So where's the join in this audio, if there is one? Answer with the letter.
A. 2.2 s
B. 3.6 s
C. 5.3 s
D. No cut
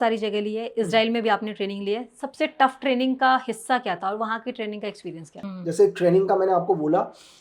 C